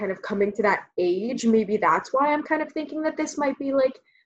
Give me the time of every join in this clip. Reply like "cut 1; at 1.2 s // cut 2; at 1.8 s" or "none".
none